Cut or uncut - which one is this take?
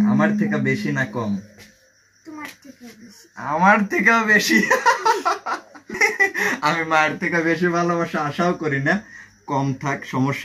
cut